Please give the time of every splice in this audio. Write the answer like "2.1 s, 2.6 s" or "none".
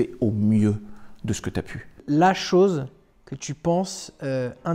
2.0 s